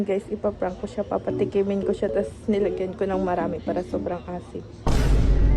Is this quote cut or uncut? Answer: cut